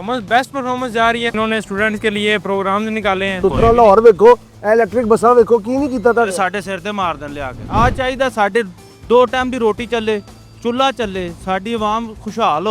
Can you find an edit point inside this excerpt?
yes; 3 cuts; at 1.3 s, 3.3 s, 7.6 s

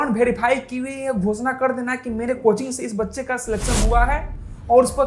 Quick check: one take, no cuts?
yes; 0 cuts

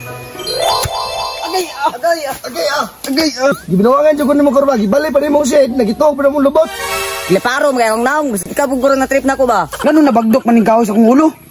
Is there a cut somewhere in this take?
yes; 1 cut; at 3.5 s

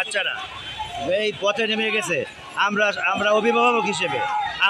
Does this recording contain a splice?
no; 0 cuts

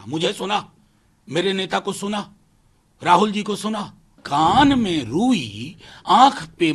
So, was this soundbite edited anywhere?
yes; 1 cut; at 4.2 s

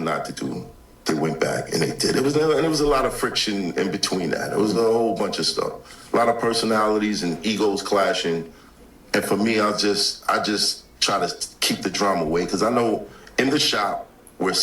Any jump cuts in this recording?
yes; 1 cut; at 1.1 s

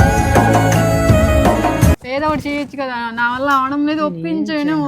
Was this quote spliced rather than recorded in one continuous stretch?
yes; 1 cut; at 2.0 s

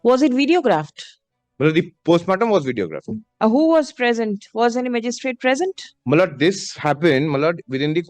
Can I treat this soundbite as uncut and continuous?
yes; 0 cuts

